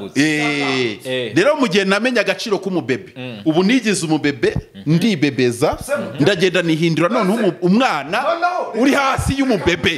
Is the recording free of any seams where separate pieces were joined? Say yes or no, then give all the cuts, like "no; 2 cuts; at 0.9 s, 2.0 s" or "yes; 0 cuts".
yes; 0 cuts